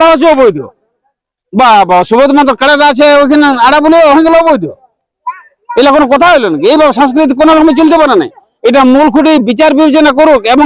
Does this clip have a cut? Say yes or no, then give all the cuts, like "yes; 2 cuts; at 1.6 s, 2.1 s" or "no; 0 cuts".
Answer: no; 0 cuts